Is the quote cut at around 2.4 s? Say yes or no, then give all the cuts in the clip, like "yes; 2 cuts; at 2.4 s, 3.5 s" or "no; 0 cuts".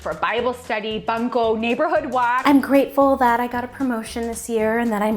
yes; 1 cut; at 2.4 s